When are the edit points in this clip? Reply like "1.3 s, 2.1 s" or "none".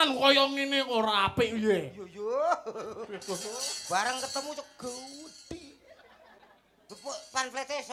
none

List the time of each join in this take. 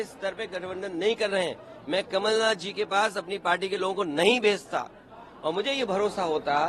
none

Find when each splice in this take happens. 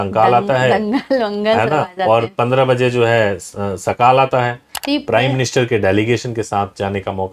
4.7 s

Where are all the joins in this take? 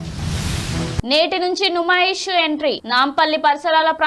1.0 s

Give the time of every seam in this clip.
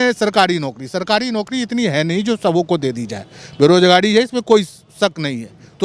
none

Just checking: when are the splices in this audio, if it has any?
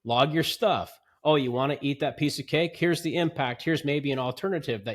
none

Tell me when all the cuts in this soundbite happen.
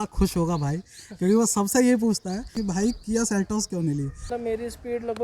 2.5 s, 4.2 s

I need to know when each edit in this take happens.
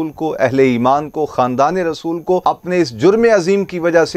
2.4 s

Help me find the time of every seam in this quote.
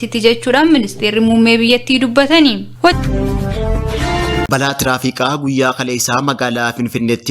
3.0 s, 4.5 s

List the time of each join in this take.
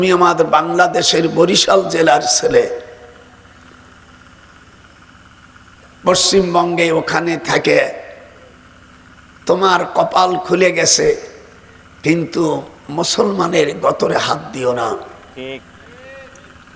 none

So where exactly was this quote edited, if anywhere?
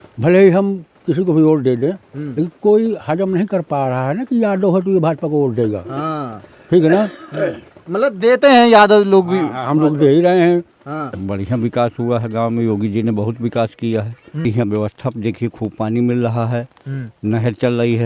11.1 s, 14.4 s

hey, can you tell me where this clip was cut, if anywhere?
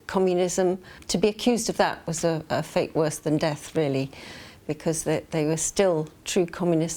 1.0 s

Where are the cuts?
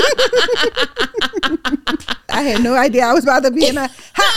2.3 s

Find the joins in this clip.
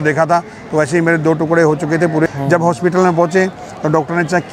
2.3 s

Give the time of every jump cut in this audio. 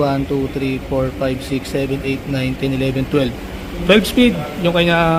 none

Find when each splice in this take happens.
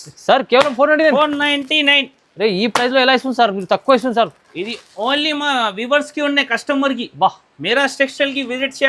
none

